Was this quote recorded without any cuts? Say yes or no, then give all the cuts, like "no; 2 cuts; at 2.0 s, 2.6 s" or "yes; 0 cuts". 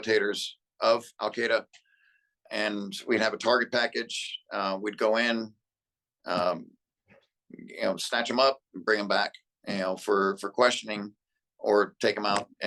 yes; 0 cuts